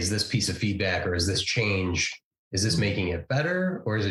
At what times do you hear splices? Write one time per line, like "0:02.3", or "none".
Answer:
none